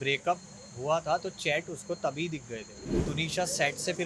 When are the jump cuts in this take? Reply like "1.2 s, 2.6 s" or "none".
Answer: 2.9 s